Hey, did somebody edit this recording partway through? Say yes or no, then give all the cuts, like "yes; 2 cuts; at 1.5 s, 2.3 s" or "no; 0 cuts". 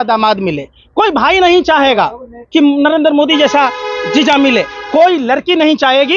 no; 0 cuts